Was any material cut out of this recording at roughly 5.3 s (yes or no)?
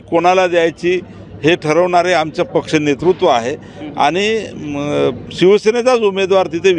no